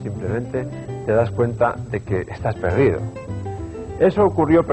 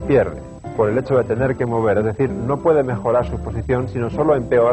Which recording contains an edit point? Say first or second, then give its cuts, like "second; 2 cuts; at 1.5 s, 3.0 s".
first; 1 cut; at 2.6 s